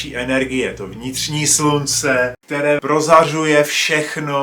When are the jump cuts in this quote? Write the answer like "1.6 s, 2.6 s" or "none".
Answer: 2.4 s

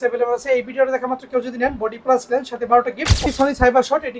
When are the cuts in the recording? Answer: 3.2 s

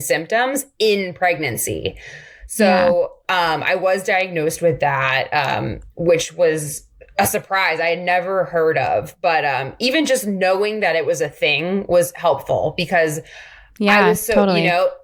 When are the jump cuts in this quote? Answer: none

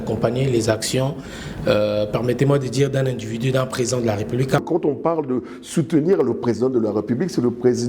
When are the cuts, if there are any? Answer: 4.6 s

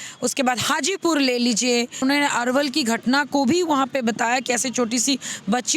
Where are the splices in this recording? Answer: 2.0 s

